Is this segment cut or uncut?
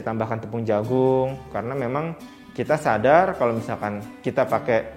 cut